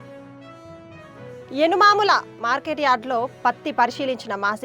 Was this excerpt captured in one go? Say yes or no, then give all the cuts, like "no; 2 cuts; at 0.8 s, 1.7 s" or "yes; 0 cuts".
no; 1 cut; at 1.4 s